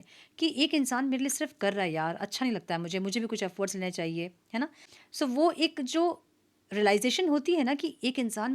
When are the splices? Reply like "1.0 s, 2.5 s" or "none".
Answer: 4.8 s